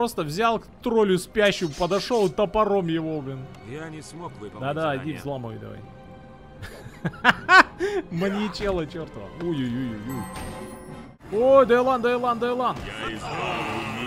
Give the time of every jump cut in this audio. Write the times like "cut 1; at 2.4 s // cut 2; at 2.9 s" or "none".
cut 1; at 11.2 s